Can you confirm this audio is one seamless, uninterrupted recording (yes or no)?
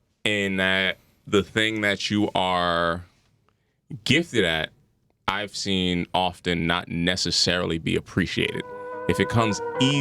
yes